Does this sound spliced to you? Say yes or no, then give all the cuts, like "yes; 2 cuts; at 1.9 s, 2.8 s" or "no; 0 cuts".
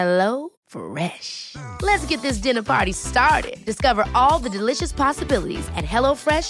no; 0 cuts